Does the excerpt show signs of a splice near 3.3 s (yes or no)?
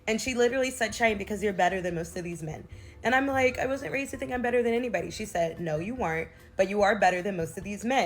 yes